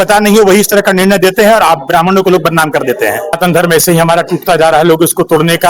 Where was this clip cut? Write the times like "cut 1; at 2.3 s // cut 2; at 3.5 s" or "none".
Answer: cut 1; at 3.4 s